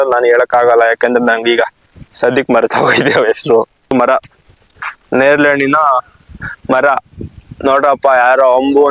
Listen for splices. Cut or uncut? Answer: cut